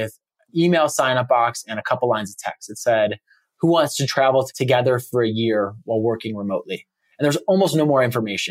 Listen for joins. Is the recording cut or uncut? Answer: uncut